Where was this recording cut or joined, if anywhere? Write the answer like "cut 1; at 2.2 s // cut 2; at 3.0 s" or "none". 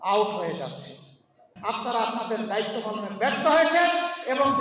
cut 1; at 1.5 s